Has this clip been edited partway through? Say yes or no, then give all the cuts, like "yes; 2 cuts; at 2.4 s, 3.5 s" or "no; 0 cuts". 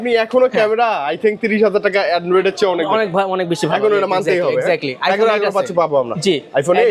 no; 0 cuts